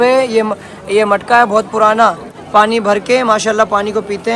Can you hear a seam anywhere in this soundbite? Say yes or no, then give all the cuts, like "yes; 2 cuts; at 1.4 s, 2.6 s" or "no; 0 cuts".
yes; 1 cut; at 2.3 s